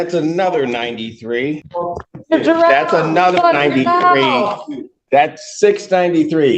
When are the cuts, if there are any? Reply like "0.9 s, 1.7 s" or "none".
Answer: 1.7 s